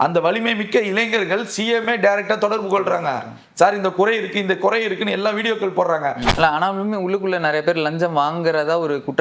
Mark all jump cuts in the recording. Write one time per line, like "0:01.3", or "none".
0:06.3